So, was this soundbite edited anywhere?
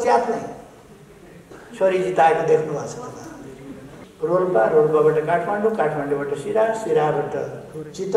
yes; 1 cut; at 4.0 s

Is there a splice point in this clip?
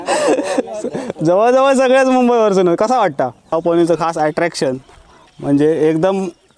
yes; 1 cut; at 3.5 s

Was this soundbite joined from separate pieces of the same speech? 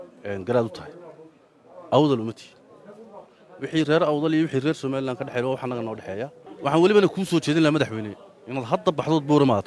yes; 1 cut; at 6.4 s

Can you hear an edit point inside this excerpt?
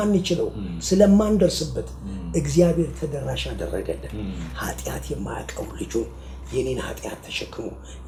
no; 0 cuts

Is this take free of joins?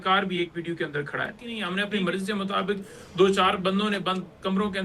no; 1 cut; at 1.5 s

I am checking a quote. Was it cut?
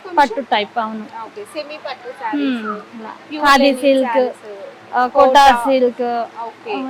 no; 0 cuts

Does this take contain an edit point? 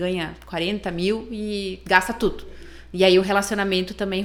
no; 0 cuts

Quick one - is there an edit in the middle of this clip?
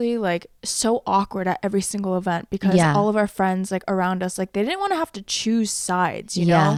no; 0 cuts

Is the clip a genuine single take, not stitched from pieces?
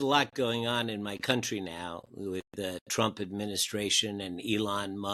yes; 0 cuts

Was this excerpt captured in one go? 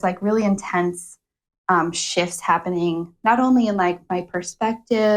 yes; 0 cuts

